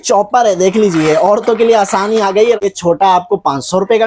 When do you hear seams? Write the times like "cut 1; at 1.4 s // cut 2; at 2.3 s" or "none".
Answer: cut 1; at 2.6 s

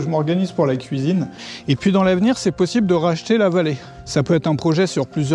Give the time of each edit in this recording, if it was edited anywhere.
cut 1; at 1.5 s // cut 2; at 3.9 s

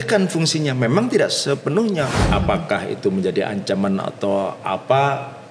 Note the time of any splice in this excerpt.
cut 1; at 2.3 s

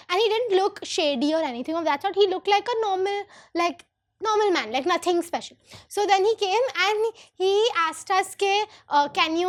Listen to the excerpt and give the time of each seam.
none

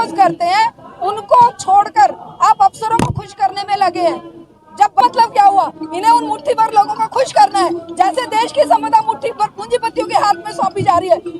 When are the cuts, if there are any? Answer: cut 1; at 5.0 s

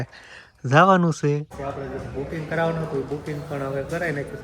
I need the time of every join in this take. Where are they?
cut 1; at 1.6 s

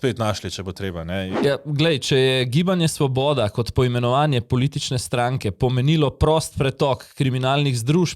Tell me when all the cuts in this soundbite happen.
cut 1; at 1.3 s

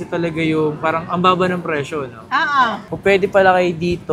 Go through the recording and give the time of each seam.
cut 1; at 2.8 s

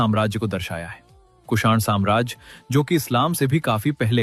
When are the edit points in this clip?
none

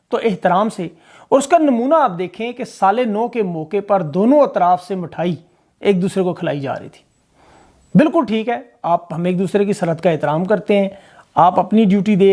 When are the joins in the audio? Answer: none

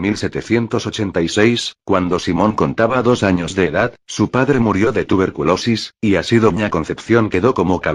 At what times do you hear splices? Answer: cut 1; at 6.4 s

